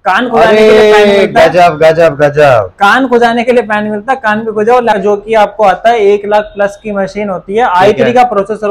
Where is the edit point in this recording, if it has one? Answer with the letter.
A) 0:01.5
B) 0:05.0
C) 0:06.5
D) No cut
B